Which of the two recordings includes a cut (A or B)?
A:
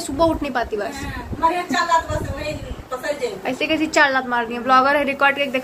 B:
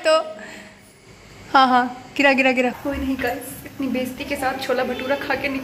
B